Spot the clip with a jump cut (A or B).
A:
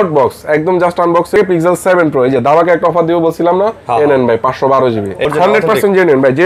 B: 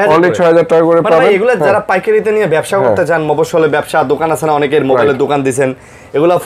A